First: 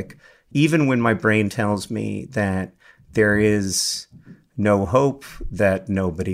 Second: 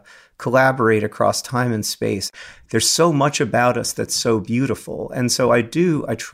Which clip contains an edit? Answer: second; 1 cut; at 2.3 s

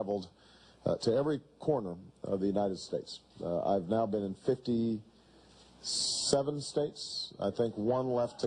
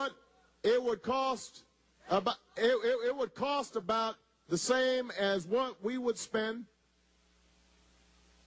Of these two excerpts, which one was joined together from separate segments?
first; 1 cut; at 7.0 s

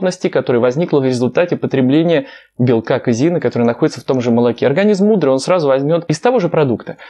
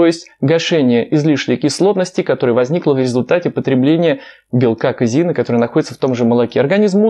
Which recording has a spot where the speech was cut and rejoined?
first; 1 cut; at 6.1 s

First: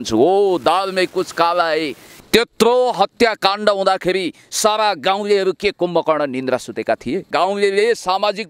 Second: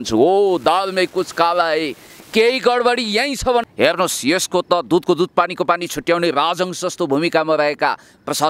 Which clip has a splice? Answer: first; 2 cuts; at 2.1 s, 7.3 s

